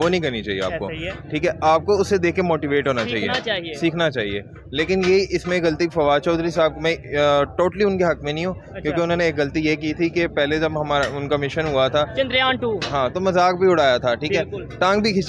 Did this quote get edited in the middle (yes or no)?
no